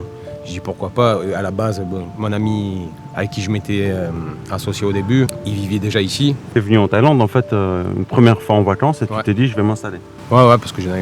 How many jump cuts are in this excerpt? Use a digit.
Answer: 2